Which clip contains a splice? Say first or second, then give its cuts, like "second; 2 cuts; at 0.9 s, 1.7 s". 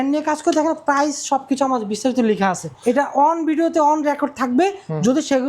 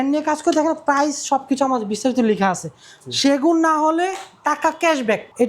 first; 1 cut; at 2.7 s